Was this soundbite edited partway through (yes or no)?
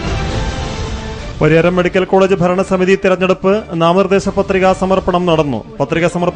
yes